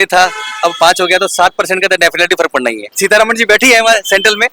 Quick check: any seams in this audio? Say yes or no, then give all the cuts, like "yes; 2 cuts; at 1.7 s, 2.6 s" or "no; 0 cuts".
yes; 1 cut; at 2.9 s